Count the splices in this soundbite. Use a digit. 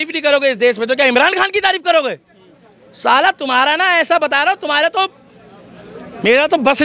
0